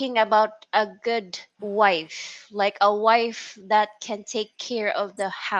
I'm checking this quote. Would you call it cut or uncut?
uncut